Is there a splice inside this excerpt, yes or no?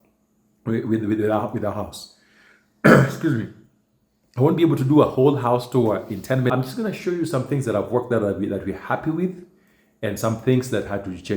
yes